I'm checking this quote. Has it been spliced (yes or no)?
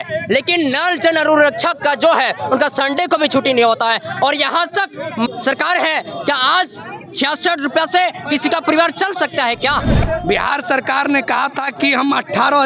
yes